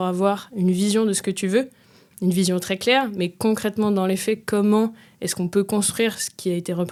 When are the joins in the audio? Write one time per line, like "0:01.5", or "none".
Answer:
none

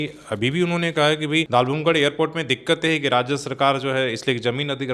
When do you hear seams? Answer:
0:01.5

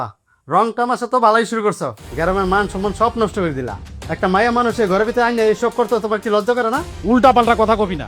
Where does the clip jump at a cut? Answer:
0:06.9

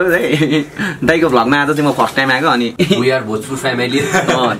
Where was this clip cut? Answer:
0:02.7

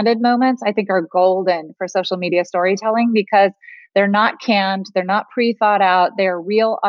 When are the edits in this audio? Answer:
none

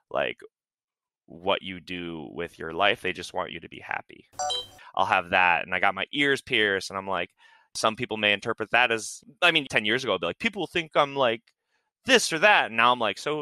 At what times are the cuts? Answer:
0:04.7

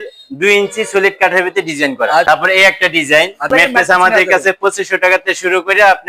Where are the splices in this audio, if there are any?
0:02.2
0:03.4

